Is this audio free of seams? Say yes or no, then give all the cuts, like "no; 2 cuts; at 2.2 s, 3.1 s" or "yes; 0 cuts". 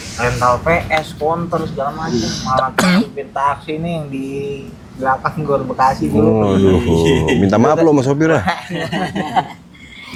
yes; 0 cuts